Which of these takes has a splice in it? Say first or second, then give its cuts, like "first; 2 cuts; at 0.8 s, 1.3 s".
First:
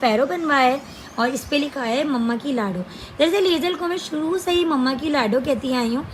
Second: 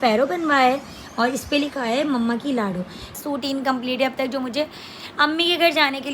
second; 1 cut; at 3.1 s